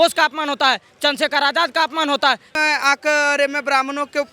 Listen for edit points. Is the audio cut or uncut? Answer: cut